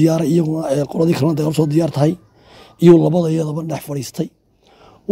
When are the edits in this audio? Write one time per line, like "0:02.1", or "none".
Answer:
none